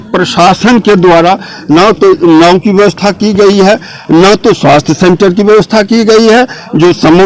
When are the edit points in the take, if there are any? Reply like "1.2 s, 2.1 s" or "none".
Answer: none